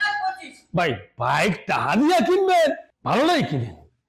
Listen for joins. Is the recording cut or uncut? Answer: uncut